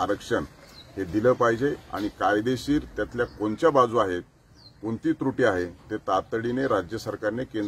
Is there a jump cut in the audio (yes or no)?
no